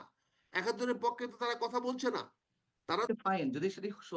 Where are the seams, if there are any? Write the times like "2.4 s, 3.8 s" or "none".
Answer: 3.1 s